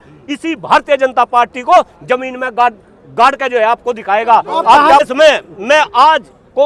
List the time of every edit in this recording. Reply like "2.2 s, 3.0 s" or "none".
5.0 s